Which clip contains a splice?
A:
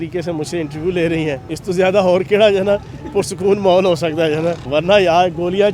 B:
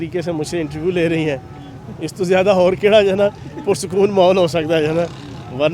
A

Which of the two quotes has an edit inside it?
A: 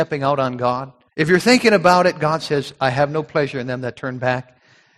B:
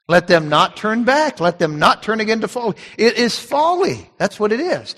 A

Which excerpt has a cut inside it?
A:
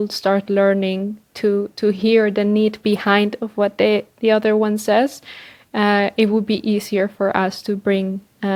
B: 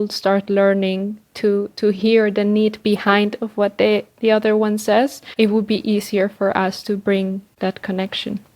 B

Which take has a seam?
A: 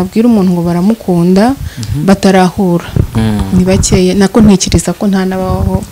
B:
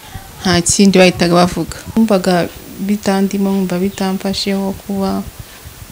B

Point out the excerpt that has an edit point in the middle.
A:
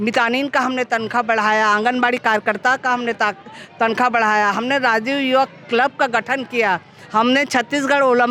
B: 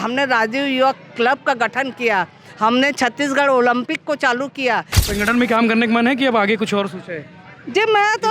B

